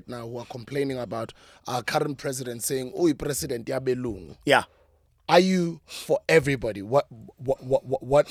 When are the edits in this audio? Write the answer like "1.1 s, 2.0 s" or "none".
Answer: none